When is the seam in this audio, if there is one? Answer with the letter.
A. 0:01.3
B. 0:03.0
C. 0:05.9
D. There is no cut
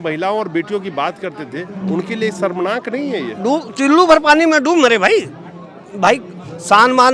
D